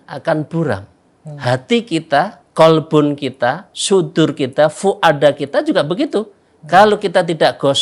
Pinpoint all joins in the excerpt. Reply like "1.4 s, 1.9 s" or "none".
2.4 s, 3.7 s